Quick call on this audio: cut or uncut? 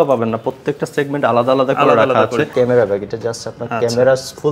cut